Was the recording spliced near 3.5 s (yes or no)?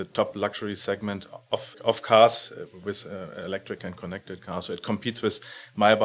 no